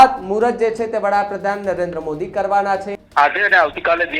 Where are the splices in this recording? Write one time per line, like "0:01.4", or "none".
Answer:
0:02.9